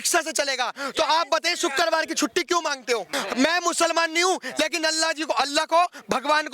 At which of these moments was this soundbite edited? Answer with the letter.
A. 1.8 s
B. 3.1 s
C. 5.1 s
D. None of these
B